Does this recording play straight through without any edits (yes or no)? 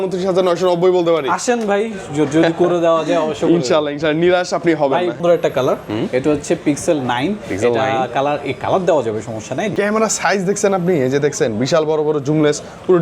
no